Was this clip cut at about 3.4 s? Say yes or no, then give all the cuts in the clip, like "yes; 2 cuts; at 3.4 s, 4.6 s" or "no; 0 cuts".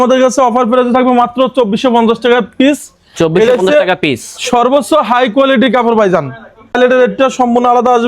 no; 1 cut; at 6.8 s